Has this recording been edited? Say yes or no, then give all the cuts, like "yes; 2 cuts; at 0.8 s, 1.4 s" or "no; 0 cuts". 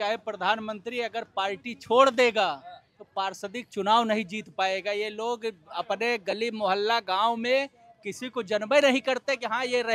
no; 0 cuts